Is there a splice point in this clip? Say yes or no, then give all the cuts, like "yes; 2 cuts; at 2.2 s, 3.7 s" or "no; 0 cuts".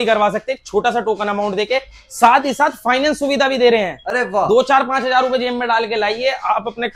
no; 0 cuts